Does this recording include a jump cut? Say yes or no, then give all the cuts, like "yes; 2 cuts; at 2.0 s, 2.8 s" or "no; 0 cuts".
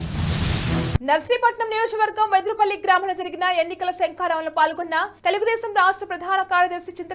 yes; 1 cut; at 0.9 s